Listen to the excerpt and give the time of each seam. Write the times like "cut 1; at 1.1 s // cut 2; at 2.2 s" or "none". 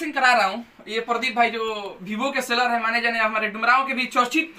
none